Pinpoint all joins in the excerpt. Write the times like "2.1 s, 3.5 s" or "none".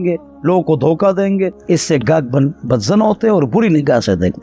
1.6 s